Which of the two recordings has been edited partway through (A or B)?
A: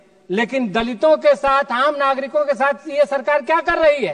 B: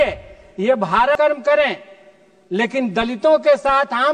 B